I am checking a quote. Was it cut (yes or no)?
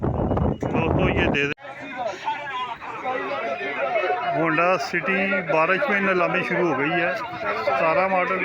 yes